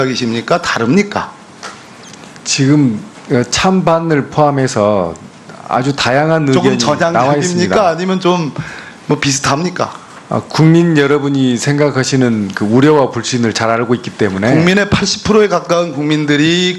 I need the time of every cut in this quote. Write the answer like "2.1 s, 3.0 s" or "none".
14.5 s